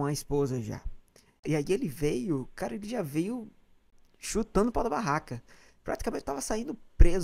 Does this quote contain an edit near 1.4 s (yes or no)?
yes